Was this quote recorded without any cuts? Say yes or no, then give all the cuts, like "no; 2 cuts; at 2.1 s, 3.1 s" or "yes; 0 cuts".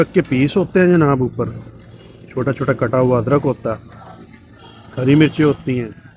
yes; 0 cuts